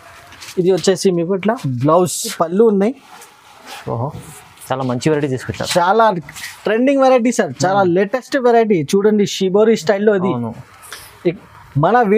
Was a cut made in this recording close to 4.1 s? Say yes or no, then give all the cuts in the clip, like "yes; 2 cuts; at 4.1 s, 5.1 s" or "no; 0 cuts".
no; 1 cut; at 2.3 s